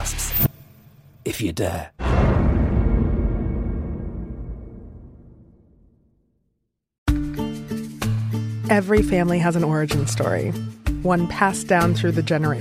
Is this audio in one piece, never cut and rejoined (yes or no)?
no